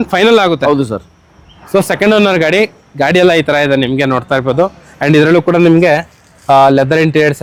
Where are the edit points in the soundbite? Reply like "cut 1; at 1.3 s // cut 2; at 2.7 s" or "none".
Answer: none

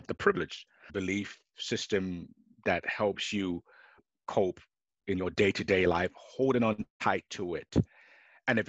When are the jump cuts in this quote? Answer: cut 1; at 0.9 s // cut 2; at 4.1 s

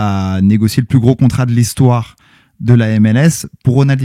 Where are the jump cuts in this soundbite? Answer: none

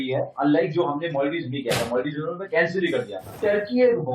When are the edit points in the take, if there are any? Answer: cut 1; at 3.2 s

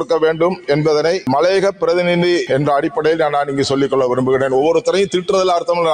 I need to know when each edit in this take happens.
cut 1; at 1.3 s // cut 2; at 2.4 s

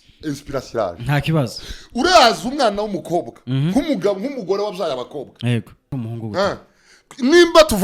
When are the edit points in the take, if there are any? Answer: cut 1; at 5.9 s

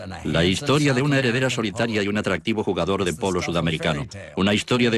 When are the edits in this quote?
cut 1; at 1.2 s

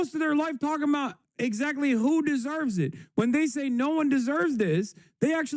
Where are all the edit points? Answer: cut 1; at 1.2 s

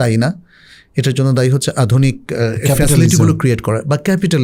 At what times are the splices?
none

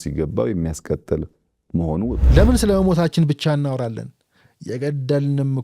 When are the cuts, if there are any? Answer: cut 1; at 2.2 s

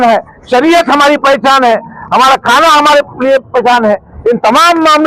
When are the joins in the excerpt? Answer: none

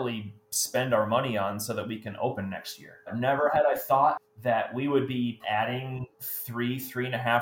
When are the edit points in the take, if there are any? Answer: cut 1; at 3.0 s // cut 2; at 4.2 s // cut 3; at 5.4 s

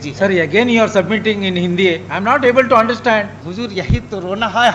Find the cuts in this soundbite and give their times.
cut 1; at 3.4 s

